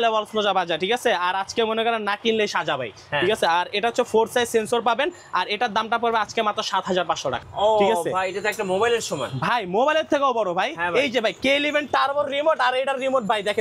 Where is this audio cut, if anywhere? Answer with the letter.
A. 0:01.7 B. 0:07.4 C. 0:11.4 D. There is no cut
B